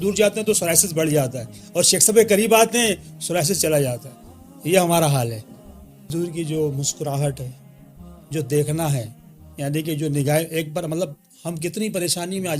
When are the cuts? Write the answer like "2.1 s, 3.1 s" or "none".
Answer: 6.1 s